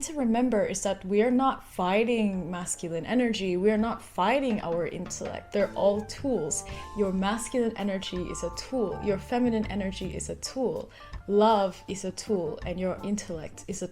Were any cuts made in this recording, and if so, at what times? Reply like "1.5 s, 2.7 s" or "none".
5.4 s